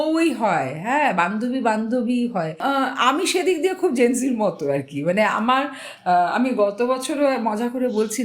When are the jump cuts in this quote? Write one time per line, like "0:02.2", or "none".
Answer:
0:02.6